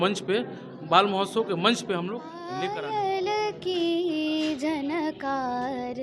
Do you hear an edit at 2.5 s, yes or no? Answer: yes